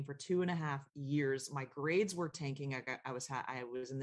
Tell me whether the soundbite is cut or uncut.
uncut